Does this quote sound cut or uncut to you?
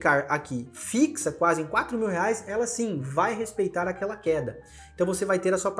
uncut